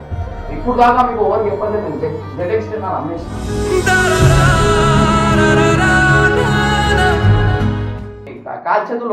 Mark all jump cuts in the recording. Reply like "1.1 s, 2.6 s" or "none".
8.2 s

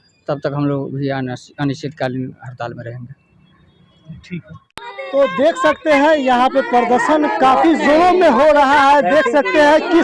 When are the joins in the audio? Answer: none

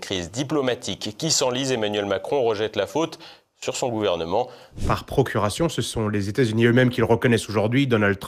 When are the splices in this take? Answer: 4.7 s

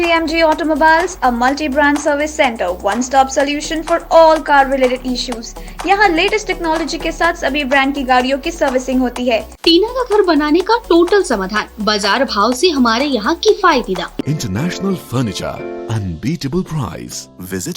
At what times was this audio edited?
9.5 s, 14.2 s

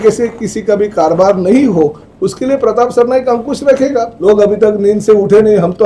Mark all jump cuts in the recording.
4.1 s

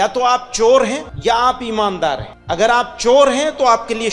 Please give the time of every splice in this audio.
1.1 s, 2.3 s

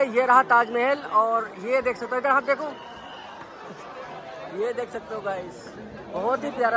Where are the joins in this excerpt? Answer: none

